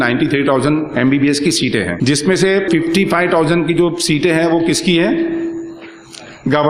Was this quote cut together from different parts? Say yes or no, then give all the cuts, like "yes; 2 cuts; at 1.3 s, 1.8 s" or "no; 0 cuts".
yes; 2 cuts; at 2.0 s, 2.7 s